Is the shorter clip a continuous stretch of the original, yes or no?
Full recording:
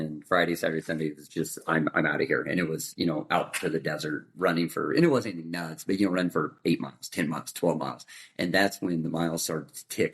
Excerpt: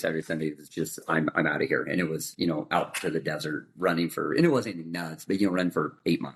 yes